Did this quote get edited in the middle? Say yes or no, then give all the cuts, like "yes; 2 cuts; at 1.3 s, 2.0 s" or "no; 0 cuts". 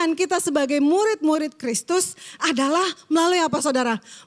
no; 0 cuts